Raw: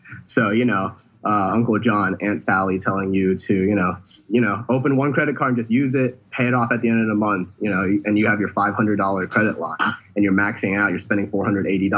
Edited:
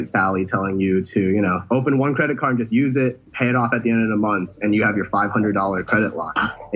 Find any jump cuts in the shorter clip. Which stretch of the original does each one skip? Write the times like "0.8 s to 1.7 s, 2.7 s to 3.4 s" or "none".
4.0 s to 4.6 s, 7.6 s to 8.0 s